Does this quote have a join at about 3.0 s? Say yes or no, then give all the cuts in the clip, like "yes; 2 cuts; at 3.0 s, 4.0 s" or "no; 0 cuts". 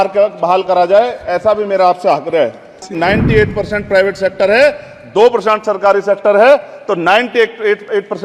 yes; 1 cut; at 3.0 s